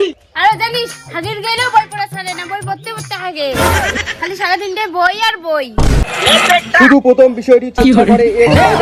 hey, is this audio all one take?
no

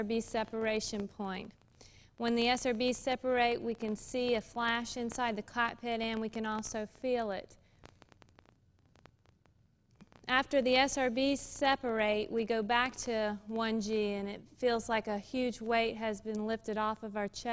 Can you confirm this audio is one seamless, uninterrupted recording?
no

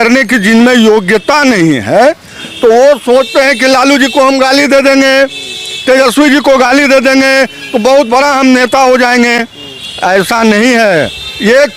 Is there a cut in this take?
no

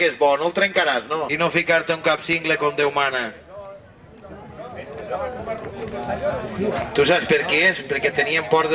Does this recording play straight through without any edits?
no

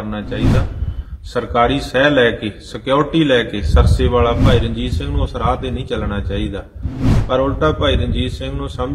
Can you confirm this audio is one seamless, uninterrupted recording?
no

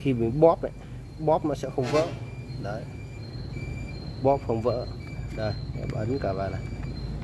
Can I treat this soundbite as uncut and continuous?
yes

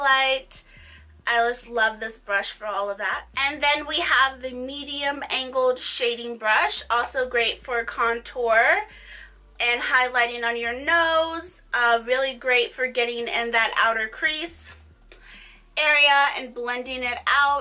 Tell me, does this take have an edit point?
no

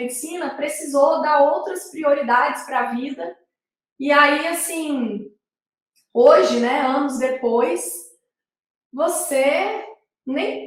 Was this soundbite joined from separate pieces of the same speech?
no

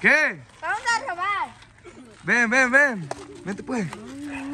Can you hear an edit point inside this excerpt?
yes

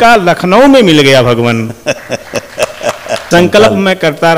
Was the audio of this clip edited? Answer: yes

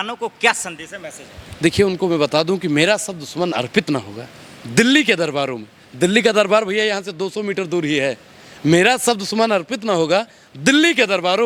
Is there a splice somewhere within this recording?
no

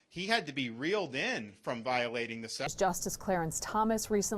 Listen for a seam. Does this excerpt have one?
yes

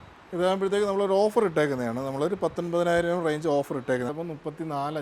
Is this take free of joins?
no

